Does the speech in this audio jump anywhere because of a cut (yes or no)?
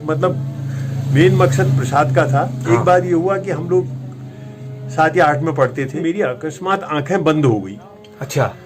yes